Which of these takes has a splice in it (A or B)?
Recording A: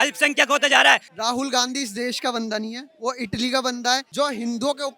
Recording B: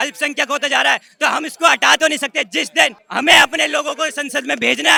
A